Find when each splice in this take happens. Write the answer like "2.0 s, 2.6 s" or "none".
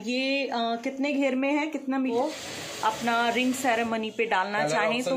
2.1 s